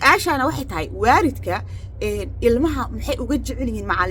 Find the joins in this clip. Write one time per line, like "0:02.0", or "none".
none

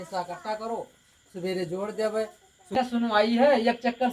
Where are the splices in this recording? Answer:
0:02.8

